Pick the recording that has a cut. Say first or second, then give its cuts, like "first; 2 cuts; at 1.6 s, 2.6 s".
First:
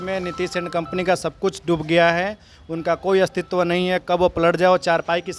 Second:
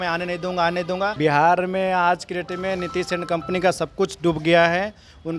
second; 1 cut; at 1.2 s